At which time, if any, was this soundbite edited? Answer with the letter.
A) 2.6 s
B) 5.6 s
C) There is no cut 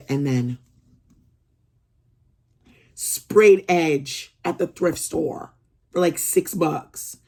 C